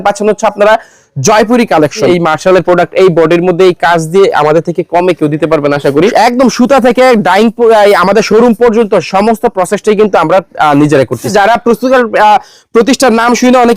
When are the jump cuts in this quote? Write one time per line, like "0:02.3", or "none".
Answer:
0:02.1
0:06.1
0:11.3